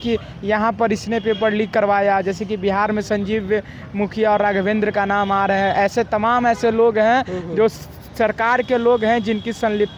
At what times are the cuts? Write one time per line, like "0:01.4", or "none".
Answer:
none